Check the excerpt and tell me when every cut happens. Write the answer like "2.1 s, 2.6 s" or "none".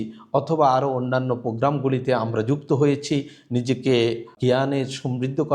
4.3 s